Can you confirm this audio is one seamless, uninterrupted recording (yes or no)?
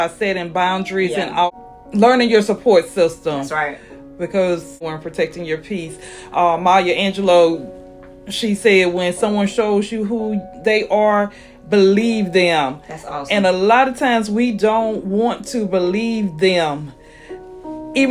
no